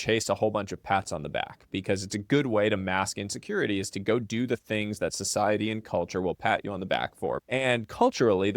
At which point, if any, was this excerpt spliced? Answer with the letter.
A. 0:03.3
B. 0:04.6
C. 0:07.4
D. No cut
C